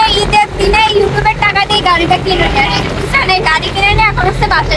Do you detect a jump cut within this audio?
no; 0 cuts

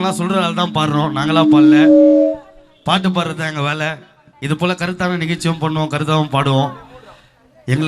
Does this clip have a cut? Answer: no; 0 cuts

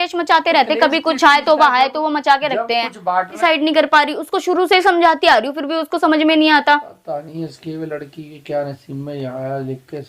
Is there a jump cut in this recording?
yes; 1 cut; at 3.3 s

